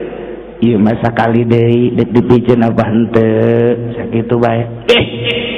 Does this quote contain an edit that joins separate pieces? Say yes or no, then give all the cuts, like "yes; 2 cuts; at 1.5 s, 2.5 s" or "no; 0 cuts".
no; 0 cuts